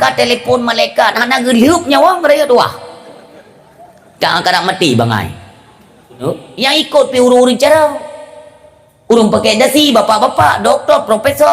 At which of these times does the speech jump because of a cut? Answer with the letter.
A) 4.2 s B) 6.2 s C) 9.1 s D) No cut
B